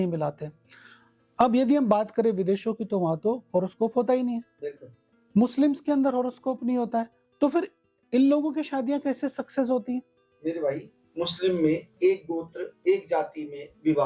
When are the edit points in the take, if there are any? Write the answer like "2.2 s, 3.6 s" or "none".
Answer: none

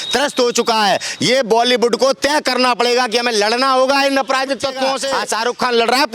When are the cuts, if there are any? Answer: 5.1 s

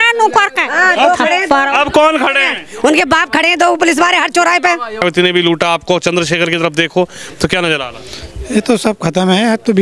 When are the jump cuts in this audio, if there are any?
5.0 s

